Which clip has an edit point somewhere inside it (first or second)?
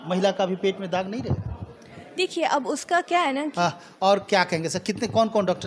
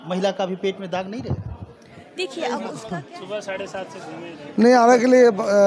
second